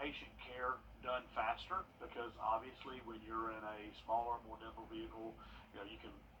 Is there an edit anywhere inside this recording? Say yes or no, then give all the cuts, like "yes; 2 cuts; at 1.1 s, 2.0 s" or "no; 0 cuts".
no; 0 cuts